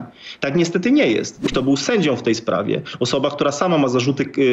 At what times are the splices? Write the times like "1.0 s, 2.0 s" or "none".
1.4 s

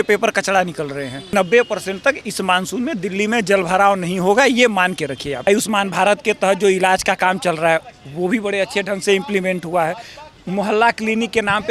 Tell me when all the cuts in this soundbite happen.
1.3 s, 5.4 s

